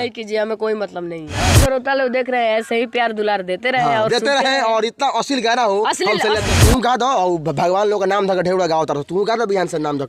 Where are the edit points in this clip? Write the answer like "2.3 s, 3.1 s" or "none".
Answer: 1.4 s, 6.5 s